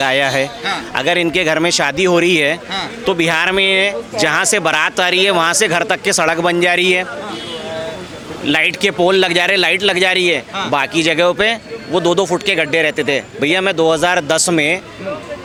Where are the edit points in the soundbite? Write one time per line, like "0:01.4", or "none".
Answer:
none

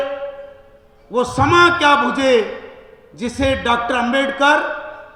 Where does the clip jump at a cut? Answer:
none

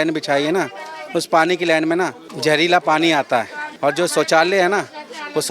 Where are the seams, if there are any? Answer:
0:02.2
0:03.6

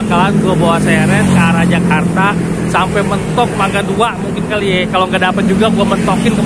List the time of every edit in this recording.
none

